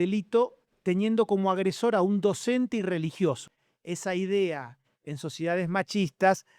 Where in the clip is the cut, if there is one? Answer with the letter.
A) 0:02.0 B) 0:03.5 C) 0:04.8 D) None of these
B